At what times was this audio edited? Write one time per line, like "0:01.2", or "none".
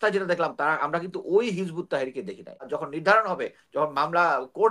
0:02.7

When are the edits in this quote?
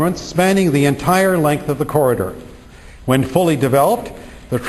0:02.7

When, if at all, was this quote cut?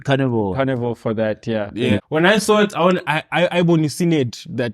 0:02.0

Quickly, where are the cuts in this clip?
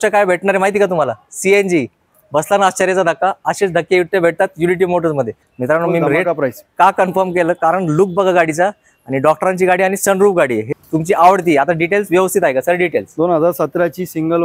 0:05.4
0:10.7

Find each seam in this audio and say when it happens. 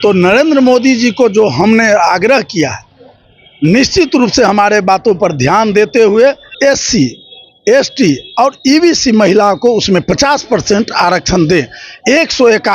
0:06.5

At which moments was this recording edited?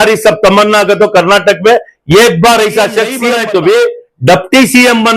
0:03.2

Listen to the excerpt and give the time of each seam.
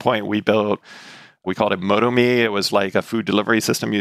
none

